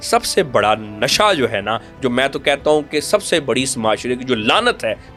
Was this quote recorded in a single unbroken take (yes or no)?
yes